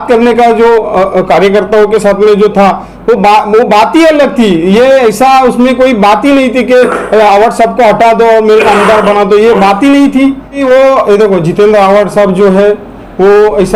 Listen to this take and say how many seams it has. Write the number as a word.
one